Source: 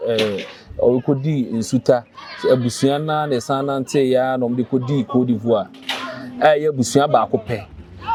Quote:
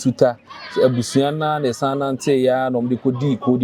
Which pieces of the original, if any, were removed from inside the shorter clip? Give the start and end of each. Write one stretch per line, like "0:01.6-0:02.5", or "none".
none